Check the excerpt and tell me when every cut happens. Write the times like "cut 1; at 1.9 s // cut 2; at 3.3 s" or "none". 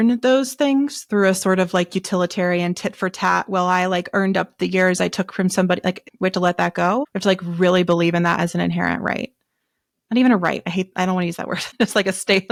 none